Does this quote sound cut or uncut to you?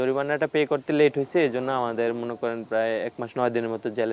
uncut